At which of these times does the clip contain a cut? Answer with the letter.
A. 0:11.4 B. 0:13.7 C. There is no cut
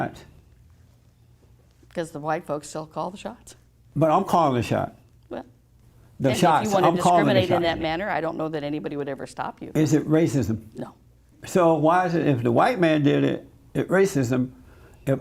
A